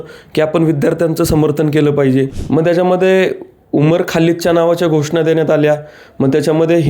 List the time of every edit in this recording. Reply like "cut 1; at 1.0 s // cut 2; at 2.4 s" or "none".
cut 1; at 2.4 s